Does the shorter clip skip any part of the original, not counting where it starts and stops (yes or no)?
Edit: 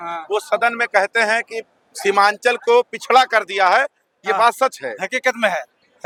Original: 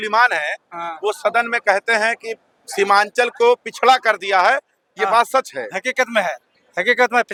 no